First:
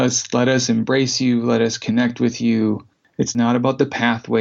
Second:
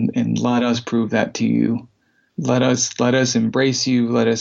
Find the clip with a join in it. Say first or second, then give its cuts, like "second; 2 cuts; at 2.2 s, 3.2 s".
first; 1 cut; at 3.4 s